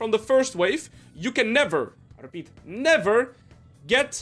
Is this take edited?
no; 0 cuts

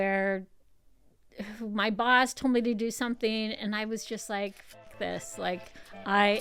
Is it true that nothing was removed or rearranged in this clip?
yes; 0 cuts

